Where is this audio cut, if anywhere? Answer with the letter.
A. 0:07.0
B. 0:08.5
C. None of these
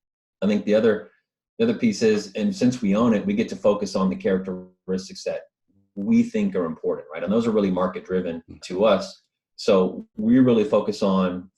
B